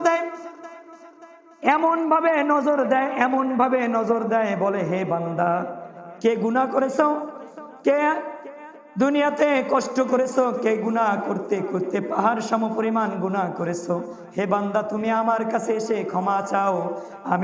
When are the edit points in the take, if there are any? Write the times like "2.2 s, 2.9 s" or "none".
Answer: none